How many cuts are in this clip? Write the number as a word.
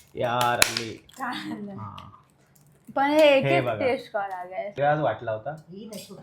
one